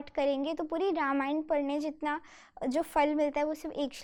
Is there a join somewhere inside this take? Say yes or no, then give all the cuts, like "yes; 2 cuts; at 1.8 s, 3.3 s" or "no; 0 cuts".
no; 0 cuts